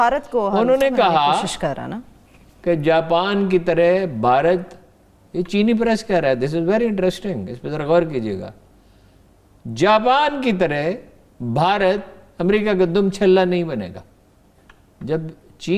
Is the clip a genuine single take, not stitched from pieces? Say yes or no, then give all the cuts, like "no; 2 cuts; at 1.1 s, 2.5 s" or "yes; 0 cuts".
yes; 0 cuts